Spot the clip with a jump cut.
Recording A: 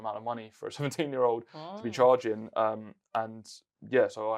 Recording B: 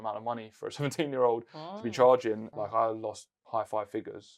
B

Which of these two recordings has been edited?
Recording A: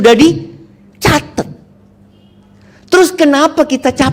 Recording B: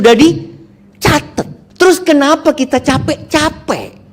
B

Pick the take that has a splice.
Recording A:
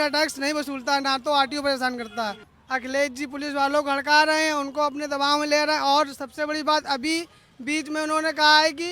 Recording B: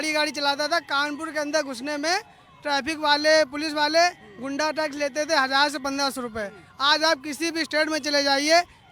A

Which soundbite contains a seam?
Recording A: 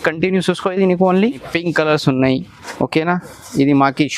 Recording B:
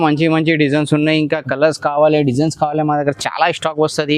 A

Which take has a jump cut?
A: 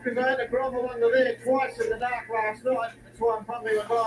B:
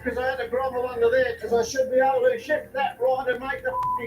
B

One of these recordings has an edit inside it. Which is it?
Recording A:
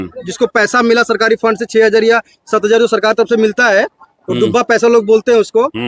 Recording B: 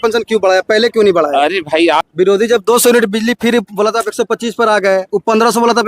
B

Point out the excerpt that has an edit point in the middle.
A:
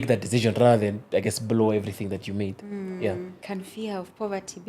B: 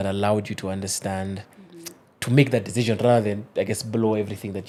A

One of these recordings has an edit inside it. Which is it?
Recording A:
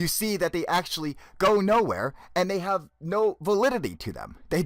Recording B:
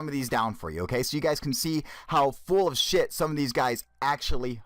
B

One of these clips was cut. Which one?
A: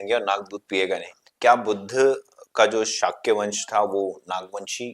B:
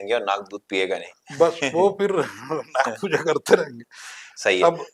A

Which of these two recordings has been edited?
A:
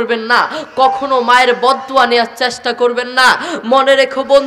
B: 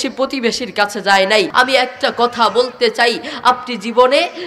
B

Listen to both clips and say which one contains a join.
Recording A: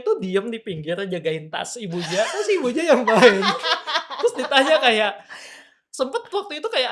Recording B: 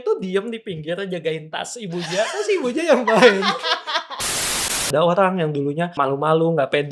B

